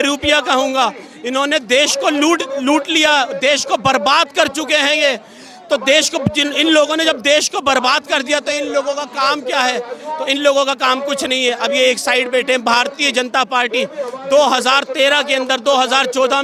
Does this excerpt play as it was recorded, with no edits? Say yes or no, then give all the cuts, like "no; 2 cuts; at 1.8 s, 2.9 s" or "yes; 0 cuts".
yes; 0 cuts